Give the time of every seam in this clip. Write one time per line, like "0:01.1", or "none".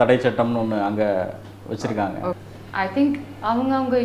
0:02.4

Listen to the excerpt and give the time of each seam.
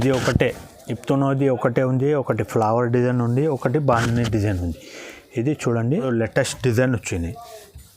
0:06.1

